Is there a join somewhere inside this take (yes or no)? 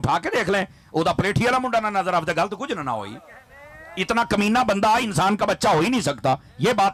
no